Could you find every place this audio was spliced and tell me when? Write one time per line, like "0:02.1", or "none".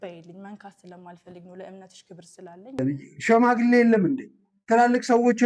0:02.8